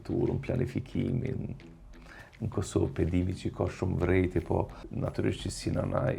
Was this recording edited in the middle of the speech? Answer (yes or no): yes